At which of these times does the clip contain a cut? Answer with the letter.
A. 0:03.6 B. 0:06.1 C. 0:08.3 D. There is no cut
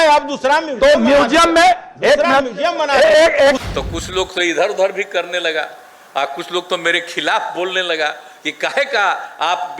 A